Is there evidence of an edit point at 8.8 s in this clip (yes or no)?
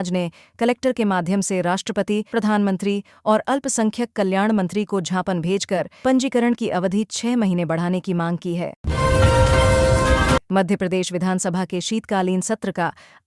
yes